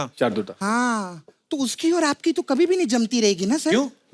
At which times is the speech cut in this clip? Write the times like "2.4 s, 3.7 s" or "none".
none